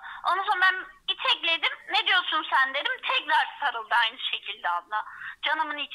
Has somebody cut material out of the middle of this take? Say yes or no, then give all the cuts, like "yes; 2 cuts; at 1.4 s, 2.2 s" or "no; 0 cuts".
no; 0 cuts